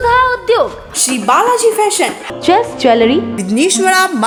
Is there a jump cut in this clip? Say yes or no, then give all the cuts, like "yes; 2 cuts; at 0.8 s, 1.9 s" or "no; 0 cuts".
no; 0 cuts